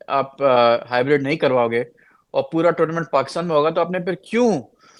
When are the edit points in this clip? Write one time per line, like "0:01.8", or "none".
none

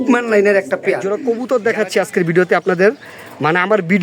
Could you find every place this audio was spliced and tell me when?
0:01.0

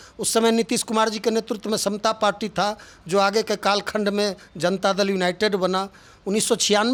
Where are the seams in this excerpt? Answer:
none

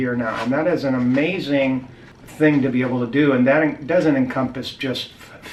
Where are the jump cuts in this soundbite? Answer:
none

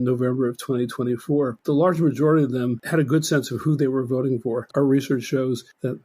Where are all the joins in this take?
0:01.6
0:02.8
0:04.7

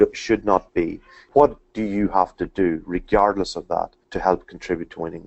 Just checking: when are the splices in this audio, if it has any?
0:01.1
0:04.0

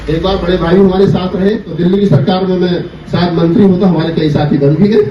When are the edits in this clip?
0:01.7

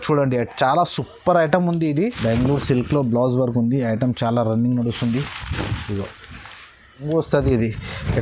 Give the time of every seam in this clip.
0:02.1
0:07.0

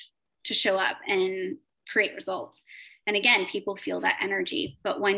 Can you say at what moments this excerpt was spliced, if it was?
0:01.8

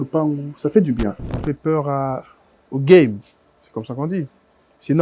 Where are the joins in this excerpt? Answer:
0:01.2

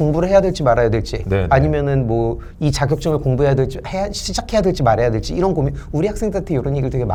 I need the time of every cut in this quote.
none

